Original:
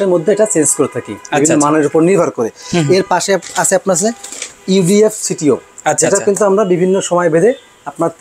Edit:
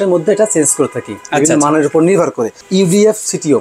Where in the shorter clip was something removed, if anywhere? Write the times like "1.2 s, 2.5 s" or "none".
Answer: 2.5 s